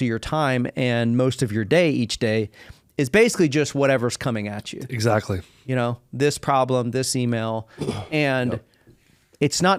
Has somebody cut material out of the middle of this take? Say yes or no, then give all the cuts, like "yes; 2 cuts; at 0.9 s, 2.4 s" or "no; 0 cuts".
no; 0 cuts